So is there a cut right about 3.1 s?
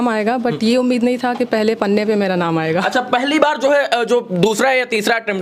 no; 0 cuts

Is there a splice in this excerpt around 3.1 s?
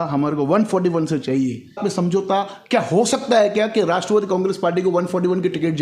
no; 1 cut; at 1.8 s

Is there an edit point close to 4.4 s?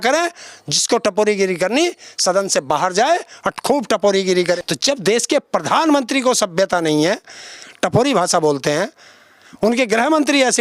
yes; 1 cut; at 4.4 s

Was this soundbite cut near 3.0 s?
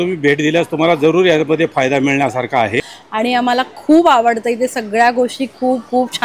yes; 1 cut; at 3.0 s

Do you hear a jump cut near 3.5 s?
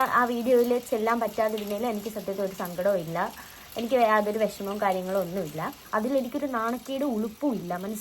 no; 1 cut; at 5.8 s

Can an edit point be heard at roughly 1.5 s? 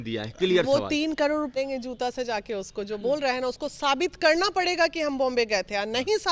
yes; 1 cut; at 1.5 s

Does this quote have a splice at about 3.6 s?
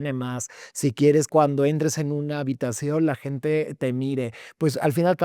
no; 1 cut; at 1.3 s

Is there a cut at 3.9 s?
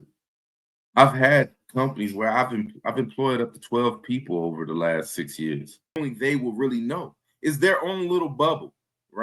no; 1 cut; at 6.0 s

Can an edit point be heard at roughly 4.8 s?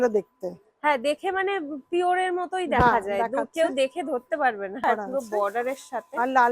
yes; 1 cut; at 4.8 s

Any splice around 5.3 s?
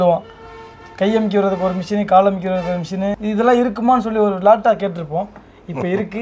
no; 0 cuts

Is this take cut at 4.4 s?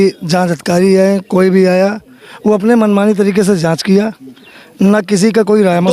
no; 0 cuts

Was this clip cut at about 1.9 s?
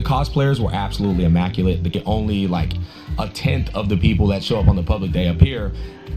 yes; 1 cut; at 1.9 s

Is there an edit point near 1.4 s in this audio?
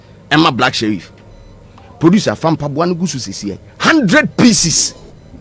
no; 0 cuts

